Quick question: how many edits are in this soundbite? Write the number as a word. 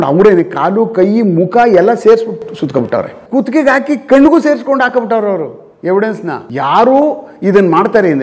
two